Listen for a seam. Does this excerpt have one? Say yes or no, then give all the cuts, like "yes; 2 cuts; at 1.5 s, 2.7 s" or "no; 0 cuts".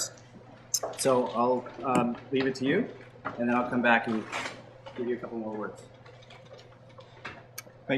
yes; 1 cut; at 2.1 s